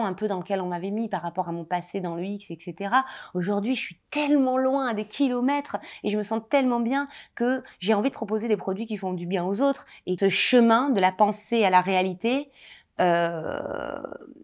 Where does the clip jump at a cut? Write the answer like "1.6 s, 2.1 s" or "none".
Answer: 10.2 s